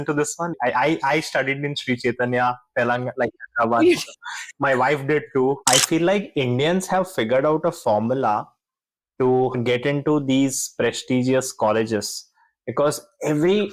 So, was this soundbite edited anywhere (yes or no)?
yes